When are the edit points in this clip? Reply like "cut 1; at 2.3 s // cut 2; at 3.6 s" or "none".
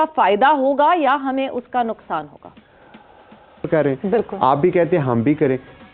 cut 1; at 3.7 s